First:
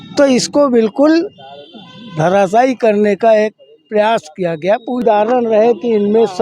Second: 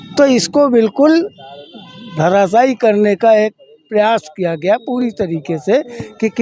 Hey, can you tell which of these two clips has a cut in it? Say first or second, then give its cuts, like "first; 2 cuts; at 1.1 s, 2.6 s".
first; 1 cut; at 5.0 s